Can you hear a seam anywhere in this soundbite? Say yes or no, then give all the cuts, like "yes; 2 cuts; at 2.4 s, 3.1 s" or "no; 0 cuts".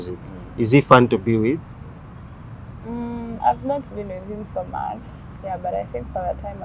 no; 0 cuts